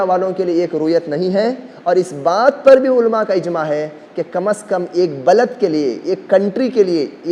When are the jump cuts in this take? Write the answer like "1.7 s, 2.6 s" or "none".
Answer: none

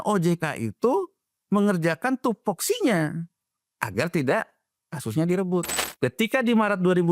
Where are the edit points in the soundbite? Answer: 5.8 s

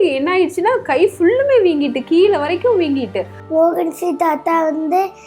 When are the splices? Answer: 3.4 s

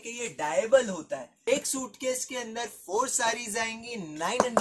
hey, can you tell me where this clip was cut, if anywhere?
1.3 s

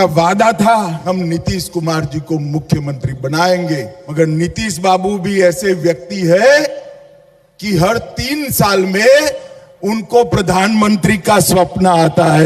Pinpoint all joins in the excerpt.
1.0 s, 4.0 s

